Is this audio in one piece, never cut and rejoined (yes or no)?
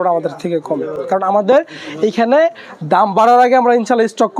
yes